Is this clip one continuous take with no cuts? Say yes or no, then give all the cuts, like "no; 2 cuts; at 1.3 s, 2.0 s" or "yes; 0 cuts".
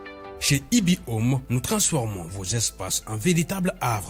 yes; 0 cuts